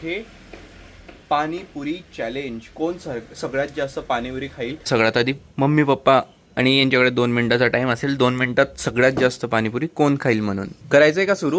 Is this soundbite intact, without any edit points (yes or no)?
no